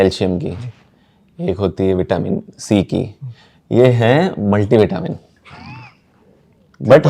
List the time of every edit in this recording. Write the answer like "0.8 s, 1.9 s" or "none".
none